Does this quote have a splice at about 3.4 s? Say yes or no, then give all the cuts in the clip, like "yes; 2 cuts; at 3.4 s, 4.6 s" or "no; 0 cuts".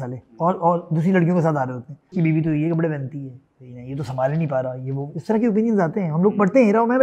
no; 1 cut; at 2.1 s